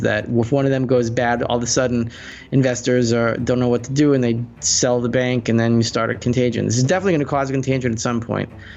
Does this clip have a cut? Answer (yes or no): yes